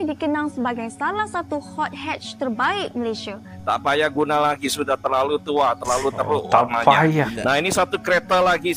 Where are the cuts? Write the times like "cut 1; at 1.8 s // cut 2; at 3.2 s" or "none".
cut 1; at 3.6 s